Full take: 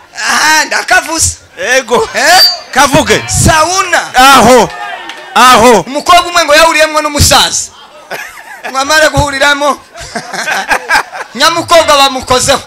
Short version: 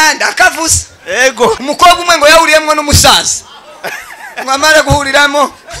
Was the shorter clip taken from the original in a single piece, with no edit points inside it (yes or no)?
no